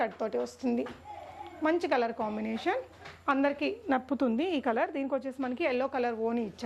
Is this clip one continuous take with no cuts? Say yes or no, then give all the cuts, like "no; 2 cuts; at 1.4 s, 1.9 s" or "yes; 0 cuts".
yes; 0 cuts